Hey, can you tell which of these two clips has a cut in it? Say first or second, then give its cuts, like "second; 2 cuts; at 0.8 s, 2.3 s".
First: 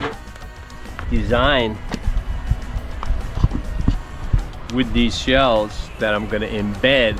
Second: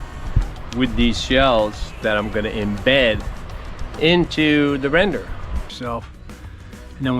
second; 1 cut; at 5.7 s